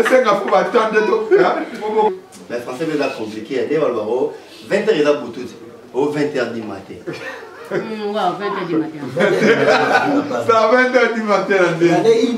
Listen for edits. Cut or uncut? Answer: cut